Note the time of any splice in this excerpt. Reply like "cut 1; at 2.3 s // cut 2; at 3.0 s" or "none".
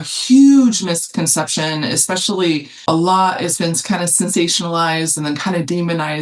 cut 1; at 2.9 s